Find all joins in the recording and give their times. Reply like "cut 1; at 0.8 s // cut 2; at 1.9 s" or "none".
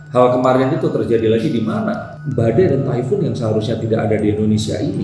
cut 1; at 2.1 s